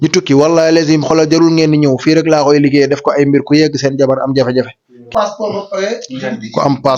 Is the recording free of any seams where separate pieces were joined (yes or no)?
no